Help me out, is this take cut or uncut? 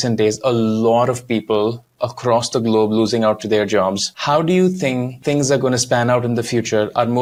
uncut